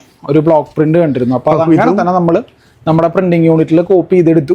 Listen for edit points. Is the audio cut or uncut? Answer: uncut